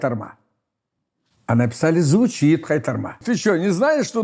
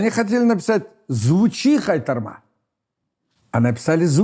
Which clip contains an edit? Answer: first; 1 cut; at 3.2 s

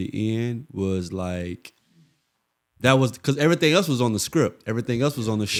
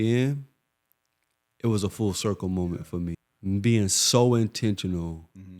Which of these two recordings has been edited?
second; 1 cut; at 3.3 s

